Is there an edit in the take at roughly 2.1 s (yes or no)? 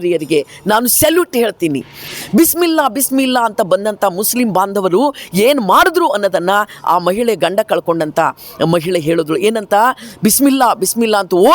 yes